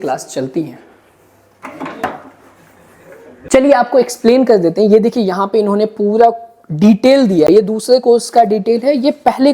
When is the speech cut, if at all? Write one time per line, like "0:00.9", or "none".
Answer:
0:03.5
0:07.5